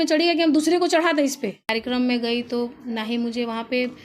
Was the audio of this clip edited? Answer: yes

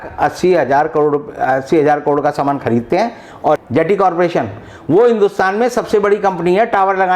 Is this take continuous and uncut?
no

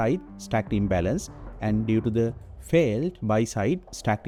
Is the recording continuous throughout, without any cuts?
yes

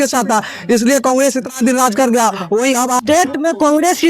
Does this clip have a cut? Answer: yes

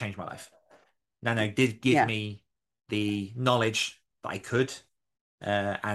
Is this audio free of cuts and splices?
yes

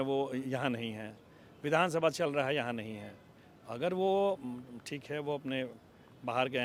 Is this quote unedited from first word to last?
yes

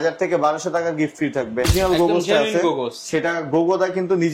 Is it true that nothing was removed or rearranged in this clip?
no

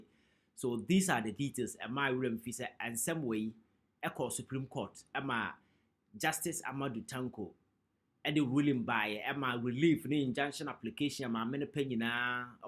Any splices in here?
yes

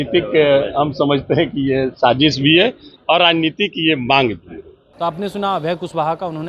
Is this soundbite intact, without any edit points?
yes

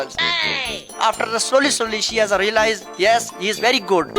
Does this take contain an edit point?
yes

